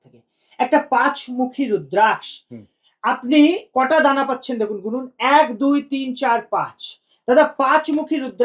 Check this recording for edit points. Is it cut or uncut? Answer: uncut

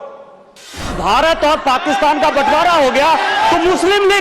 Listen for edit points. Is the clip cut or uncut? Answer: cut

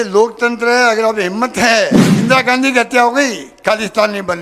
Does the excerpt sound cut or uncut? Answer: cut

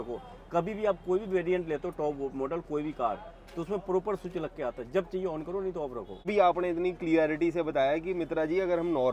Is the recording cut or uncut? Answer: cut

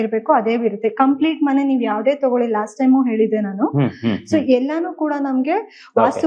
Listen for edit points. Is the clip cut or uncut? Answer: uncut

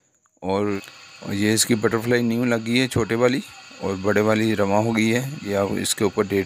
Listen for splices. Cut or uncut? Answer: cut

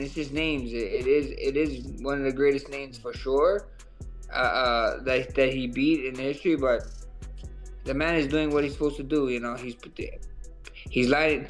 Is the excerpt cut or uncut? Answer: uncut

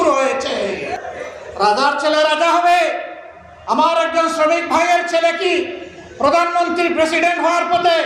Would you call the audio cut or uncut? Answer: cut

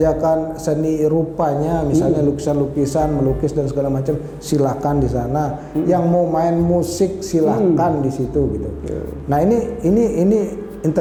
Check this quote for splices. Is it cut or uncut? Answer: uncut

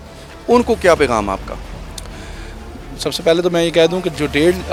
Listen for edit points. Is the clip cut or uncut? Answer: uncut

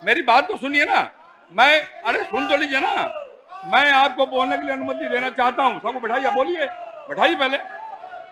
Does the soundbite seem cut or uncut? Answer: uncut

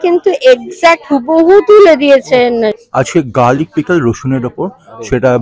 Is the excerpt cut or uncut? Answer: cut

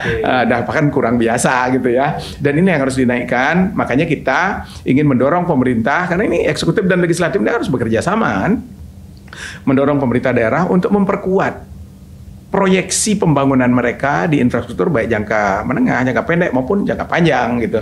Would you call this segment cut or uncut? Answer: uncut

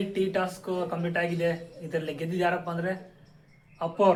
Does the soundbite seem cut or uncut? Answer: uncut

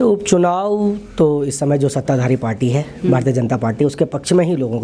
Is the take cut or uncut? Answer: uncut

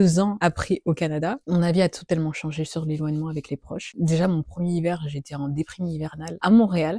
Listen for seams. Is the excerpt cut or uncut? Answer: uncut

